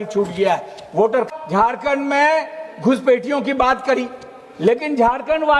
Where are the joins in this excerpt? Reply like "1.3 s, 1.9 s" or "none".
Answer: 1.3 s